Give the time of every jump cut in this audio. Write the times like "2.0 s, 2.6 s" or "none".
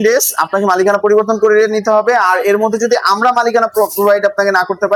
none